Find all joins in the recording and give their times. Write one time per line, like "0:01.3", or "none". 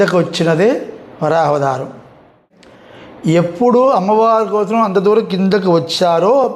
0:02.6